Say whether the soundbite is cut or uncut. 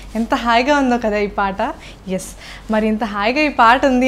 uncut